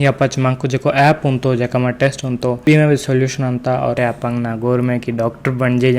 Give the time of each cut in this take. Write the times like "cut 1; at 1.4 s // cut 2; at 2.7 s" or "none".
cut 1; at 4.0 s